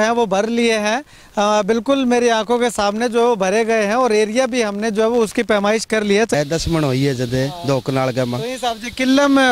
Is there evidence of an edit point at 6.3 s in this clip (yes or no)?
yes